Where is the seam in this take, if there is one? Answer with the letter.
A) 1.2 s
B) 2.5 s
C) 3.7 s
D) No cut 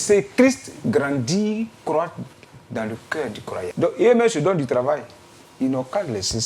C